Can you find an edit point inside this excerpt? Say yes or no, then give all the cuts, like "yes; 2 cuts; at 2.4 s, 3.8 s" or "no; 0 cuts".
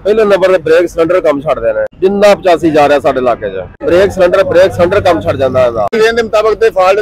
yes; 3 cuts; at 1.9 s, 3.8 s, 6.0 s